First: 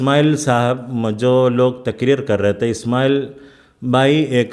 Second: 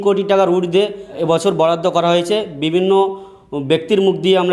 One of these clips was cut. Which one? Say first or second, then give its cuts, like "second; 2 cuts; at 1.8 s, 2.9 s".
second; 1 cut; at 1.2 s